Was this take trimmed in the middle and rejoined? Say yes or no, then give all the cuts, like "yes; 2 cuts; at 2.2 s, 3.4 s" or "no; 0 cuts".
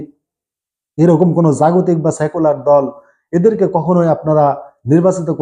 no; 0 cuts